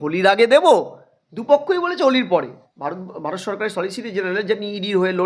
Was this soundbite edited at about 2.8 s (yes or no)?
no